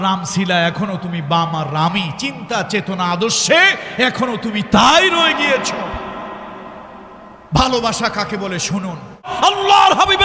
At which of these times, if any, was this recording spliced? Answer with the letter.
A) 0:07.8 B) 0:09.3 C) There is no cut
B